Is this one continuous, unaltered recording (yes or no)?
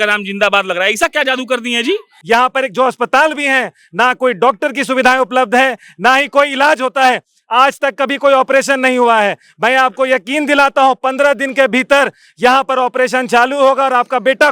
no